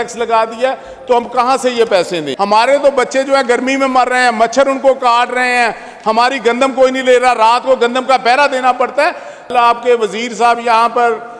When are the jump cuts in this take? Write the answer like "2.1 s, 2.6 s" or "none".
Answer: 2.3 s, 9.5 s